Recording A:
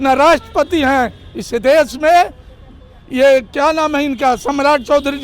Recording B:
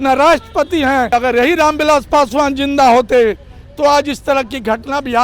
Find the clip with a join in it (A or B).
B